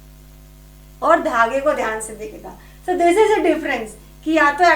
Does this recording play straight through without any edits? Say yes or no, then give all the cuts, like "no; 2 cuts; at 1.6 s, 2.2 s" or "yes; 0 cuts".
yes; 0 cuts